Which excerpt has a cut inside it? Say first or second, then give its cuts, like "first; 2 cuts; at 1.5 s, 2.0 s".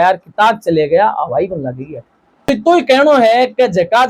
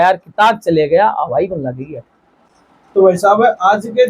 first; 1 cut; at 2.5 s